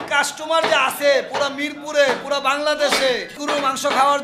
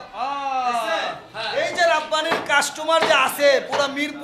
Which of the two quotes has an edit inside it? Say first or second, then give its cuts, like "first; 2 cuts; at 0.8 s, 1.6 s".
first; 1 cut; at 3.3 s